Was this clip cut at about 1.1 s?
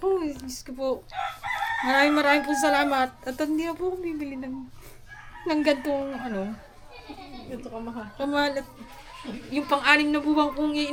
no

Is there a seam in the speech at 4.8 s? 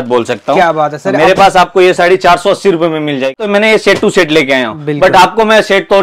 no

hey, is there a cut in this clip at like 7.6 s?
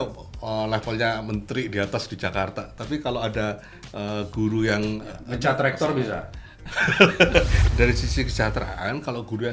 yes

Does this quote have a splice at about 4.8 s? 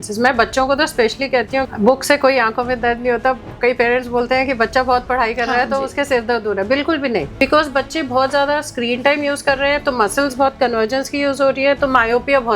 no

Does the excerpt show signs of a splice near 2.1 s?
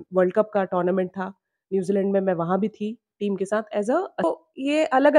no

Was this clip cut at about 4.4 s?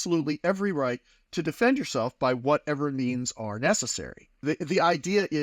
yes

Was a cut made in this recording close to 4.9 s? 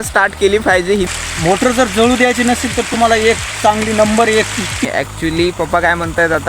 yes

